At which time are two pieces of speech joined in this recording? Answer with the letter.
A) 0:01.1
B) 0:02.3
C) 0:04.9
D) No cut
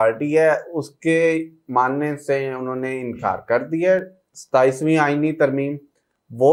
D